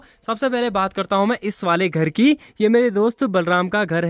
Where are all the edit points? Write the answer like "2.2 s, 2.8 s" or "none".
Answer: none